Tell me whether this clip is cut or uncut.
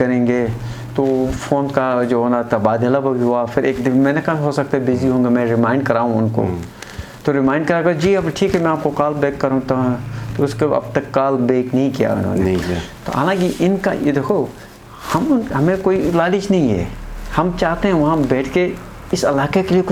uncut